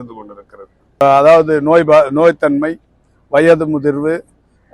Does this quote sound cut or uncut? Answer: cut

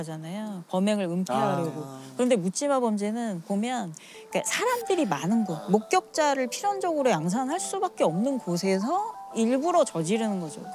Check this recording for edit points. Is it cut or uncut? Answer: uncut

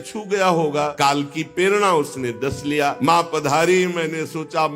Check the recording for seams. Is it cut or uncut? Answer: cut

